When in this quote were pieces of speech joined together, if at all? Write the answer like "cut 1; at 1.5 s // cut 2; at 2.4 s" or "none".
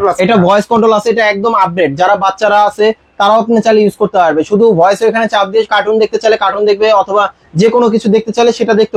none